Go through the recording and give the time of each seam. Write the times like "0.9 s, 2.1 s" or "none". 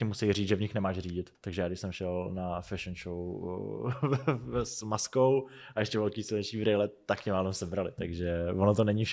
1.3 s